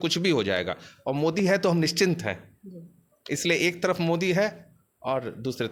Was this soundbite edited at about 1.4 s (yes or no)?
no